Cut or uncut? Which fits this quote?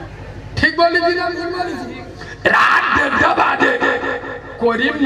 uncut